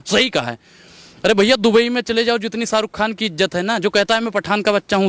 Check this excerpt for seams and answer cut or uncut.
uncut